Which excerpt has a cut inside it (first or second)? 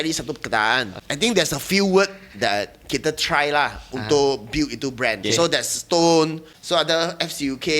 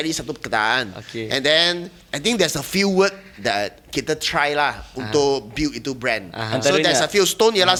first